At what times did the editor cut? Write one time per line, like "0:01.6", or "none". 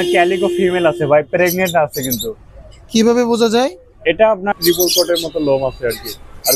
0:04.5